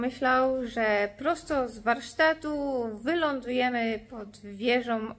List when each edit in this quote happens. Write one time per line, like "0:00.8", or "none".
none